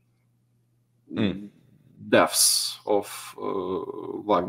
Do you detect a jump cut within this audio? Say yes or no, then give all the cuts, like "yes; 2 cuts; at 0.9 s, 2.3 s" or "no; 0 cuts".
no; 0 cuts